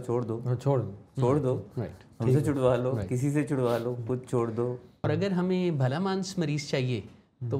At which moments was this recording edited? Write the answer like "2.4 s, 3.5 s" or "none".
5.0 s